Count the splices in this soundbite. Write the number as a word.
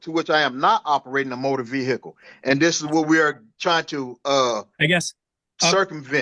zero